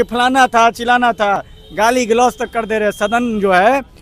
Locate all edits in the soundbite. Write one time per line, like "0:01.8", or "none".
none